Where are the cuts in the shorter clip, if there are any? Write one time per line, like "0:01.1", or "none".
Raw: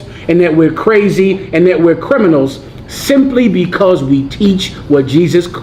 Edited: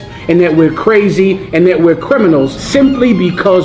0:02.6